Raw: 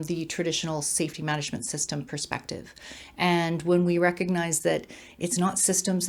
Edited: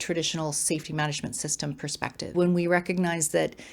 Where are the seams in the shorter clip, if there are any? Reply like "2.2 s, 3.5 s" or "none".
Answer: 2.3 s